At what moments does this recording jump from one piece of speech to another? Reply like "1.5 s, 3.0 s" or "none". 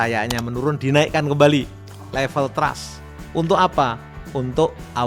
none